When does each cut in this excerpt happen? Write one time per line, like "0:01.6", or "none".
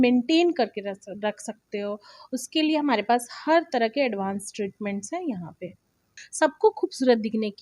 0:06.2